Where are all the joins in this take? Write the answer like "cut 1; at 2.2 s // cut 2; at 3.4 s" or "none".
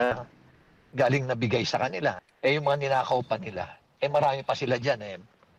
cut 1; at 2.3 s // cut 2; at 4.3 s